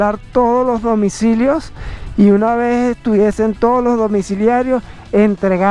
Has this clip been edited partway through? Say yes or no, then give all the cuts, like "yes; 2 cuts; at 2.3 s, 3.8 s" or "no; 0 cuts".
no; 0 cuts